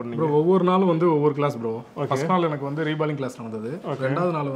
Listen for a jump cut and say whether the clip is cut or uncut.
uncut